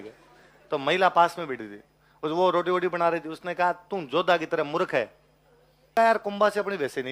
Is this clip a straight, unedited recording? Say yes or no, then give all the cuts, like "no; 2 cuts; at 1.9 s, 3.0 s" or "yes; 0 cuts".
no; 1 cut; at 5.9 s